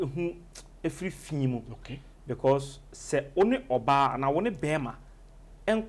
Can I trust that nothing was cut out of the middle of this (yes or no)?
yes